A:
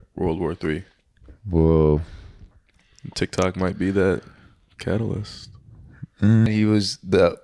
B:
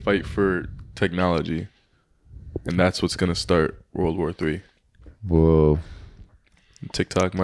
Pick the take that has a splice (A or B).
A